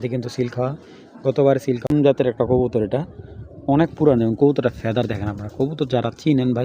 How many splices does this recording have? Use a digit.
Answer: 1